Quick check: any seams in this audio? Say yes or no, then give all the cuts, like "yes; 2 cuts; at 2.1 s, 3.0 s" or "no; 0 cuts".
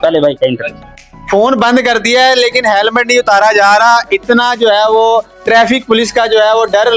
no; 0 cuts